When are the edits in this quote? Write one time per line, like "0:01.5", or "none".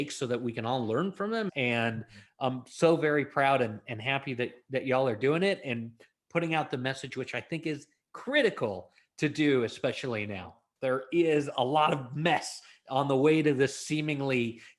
0:01.5
0:10.6